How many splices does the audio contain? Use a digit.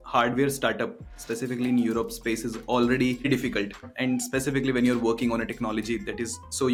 0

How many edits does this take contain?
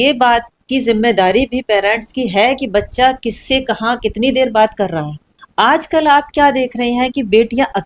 1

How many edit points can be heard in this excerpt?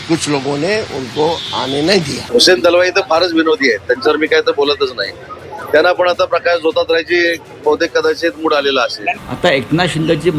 1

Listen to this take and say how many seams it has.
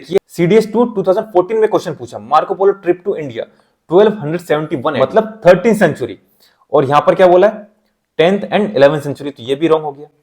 1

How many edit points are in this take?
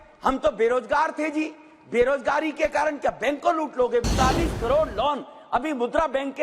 1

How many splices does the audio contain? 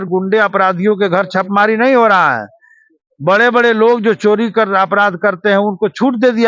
0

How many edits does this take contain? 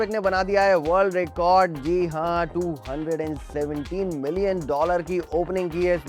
0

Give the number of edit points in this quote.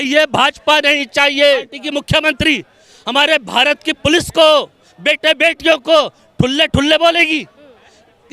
1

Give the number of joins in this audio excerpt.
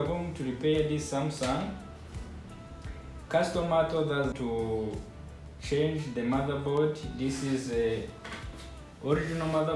1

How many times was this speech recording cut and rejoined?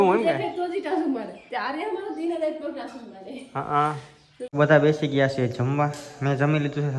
1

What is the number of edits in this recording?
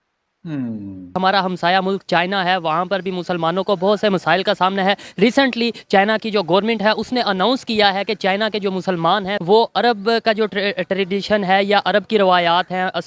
2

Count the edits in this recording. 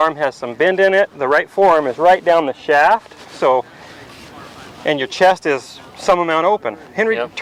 0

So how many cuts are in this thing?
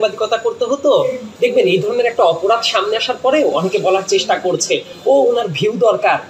1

